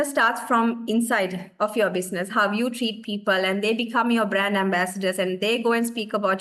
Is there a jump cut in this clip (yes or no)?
no